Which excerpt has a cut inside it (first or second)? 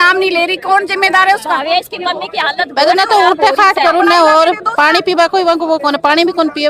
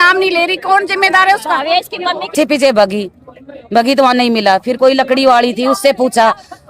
second